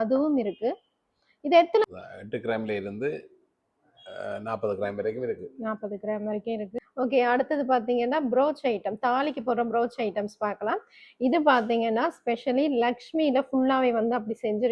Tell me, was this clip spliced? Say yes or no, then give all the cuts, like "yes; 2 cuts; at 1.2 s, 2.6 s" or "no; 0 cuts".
yes; 2 cuts; at 1.8 s, 6.8 s